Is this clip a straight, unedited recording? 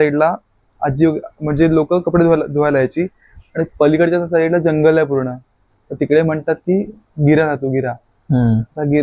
yes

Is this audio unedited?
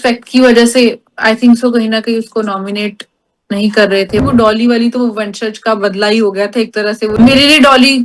no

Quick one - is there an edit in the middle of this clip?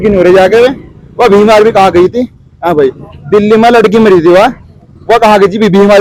no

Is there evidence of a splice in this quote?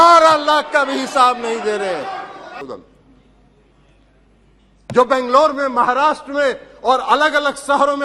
yes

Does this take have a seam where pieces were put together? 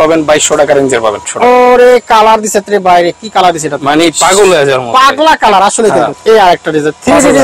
yes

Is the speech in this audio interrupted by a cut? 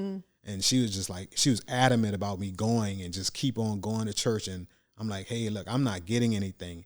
no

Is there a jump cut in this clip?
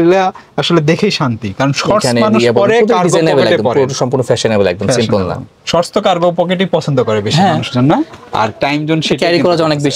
no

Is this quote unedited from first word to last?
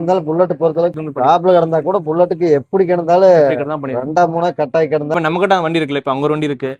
no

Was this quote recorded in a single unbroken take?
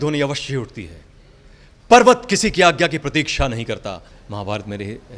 no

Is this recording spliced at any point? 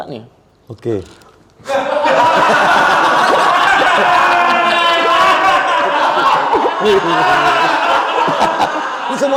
no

